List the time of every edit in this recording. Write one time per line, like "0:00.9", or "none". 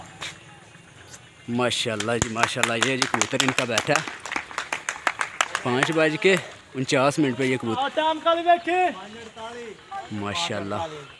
0:07.8

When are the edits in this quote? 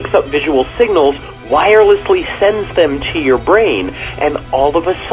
none

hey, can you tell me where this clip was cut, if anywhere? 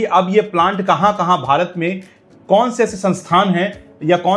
none

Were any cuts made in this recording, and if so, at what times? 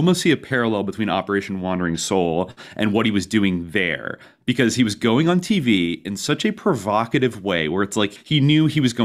0:08.2

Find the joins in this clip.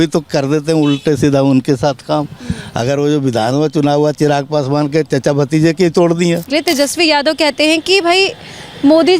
0:06.5

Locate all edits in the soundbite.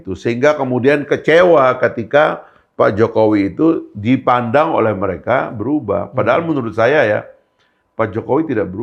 none

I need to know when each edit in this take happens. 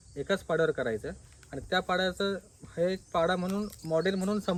none

